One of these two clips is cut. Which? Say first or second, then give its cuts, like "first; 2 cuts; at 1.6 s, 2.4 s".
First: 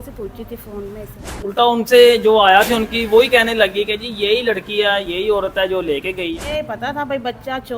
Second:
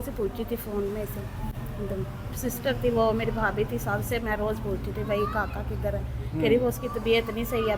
first; 2 cuts; at 1.4 s, 6.4 s